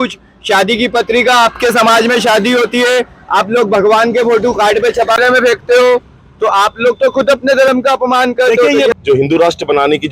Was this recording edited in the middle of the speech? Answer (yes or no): yes